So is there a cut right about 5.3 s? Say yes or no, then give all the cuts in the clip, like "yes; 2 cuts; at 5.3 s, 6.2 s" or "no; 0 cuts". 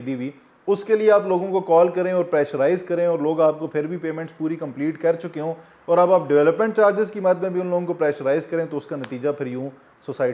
no; 0 cuts